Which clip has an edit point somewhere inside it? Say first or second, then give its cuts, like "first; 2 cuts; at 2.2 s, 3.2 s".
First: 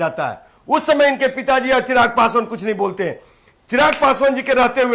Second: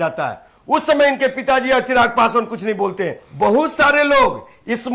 second; 1 cut; at 3.2 s